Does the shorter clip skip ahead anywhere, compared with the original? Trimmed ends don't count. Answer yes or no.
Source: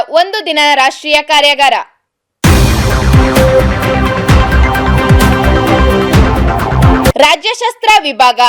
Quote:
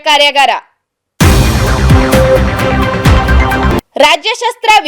yes